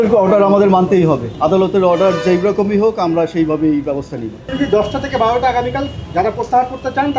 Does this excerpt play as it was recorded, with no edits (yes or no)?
no